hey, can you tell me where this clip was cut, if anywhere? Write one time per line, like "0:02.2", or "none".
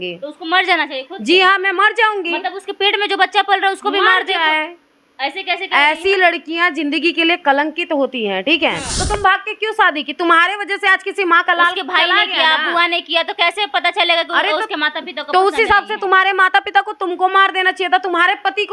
0:08.9

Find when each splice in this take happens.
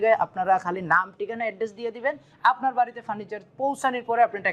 none

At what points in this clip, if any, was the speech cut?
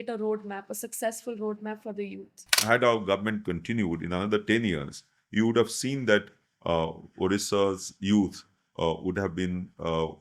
0:02.6

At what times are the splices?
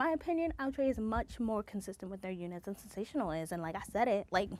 none

